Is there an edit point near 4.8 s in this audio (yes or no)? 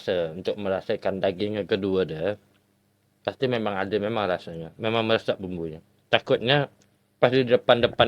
no